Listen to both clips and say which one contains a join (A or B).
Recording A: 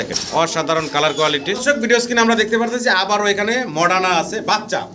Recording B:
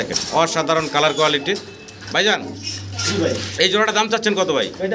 A